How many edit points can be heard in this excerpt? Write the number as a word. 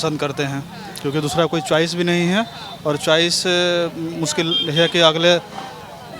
zero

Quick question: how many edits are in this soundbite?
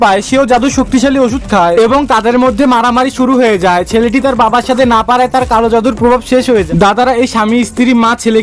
one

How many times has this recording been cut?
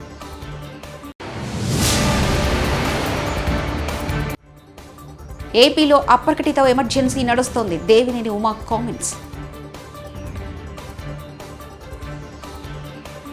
one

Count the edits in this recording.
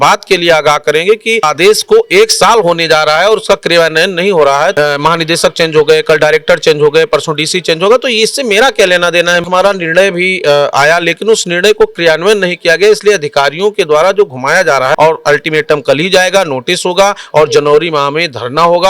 four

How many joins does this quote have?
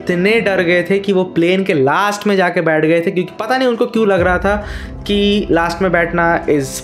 zero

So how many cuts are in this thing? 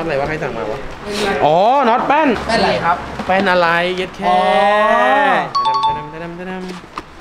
two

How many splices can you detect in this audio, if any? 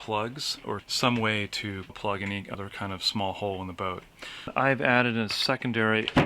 three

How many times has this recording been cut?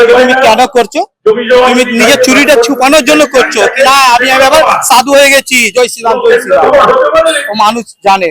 zero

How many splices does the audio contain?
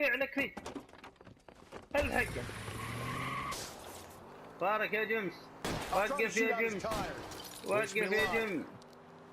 one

